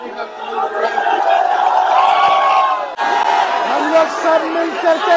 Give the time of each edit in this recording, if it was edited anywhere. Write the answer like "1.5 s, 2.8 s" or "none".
2.9 s